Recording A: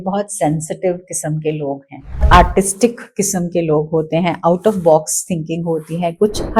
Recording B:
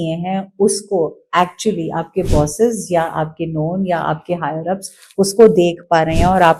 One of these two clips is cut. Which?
A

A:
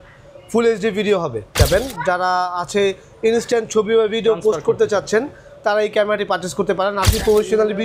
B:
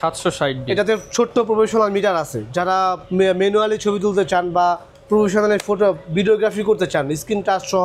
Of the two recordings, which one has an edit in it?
A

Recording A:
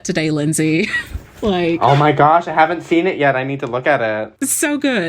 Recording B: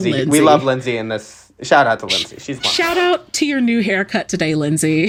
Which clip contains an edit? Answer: A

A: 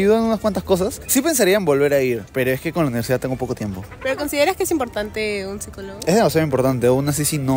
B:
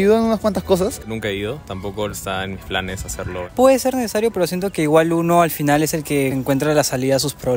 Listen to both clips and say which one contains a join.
B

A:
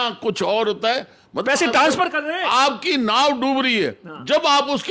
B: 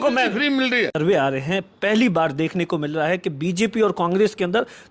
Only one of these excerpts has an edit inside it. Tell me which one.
B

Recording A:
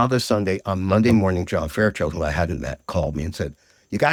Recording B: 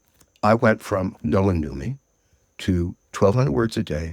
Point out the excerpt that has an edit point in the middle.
B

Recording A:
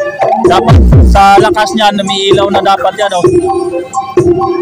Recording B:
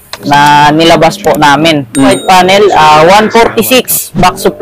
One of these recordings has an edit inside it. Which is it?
B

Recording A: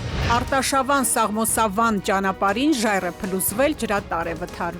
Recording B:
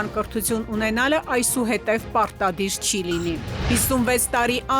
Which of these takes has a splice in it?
B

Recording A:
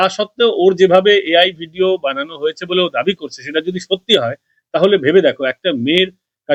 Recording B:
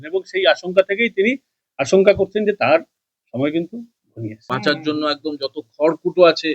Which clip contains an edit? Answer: B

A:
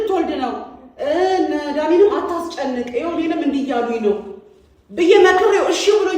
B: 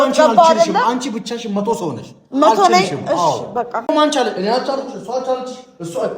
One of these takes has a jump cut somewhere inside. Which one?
B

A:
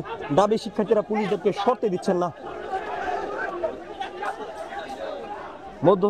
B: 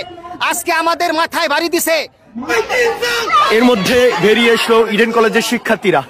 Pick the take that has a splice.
B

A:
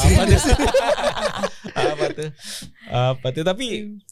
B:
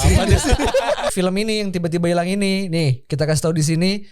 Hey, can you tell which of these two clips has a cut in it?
B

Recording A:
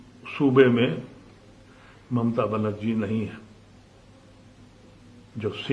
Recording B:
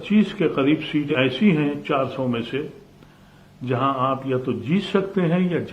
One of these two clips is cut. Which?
B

